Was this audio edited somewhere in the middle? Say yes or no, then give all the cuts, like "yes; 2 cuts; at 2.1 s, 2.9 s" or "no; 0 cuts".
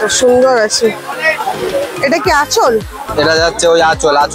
no; 0 cuts